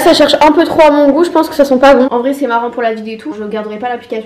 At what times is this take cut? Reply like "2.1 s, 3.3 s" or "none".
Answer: 2.1 s, 3.3 s

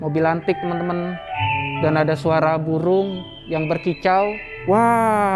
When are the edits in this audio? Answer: 1.3 s, 4.5 s

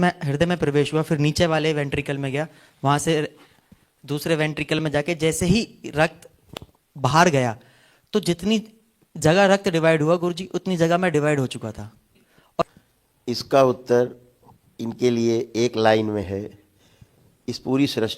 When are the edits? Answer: 12.6 s

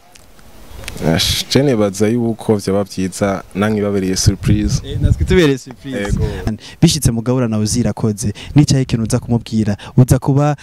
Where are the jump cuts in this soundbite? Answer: 6.5 s

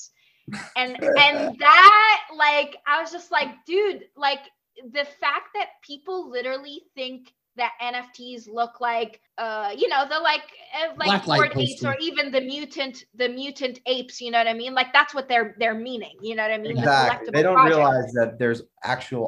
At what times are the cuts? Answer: 9.2 s

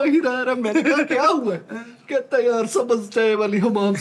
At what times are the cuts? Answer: none

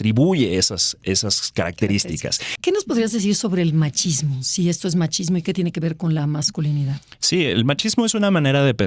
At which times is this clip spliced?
2.4 s

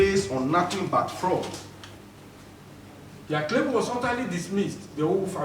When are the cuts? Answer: 2.0 s

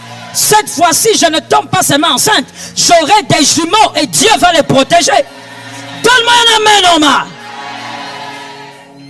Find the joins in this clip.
none

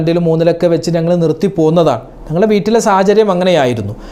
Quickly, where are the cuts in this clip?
none

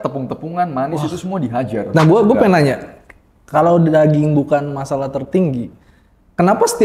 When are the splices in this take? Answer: 1.9 s

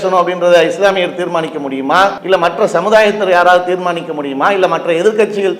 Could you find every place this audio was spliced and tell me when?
2.2 s

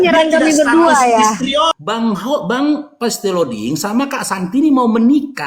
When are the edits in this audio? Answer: 1.7 s

